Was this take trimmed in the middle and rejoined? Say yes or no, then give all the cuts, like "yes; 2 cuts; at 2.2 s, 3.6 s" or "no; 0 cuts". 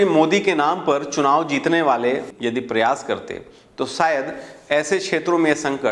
yes; 1 cut; at 2.2 s